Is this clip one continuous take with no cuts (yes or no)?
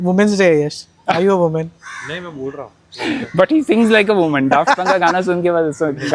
yes